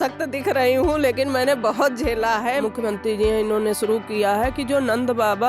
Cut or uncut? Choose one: cut